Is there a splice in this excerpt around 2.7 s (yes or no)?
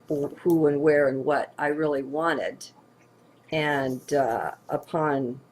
yes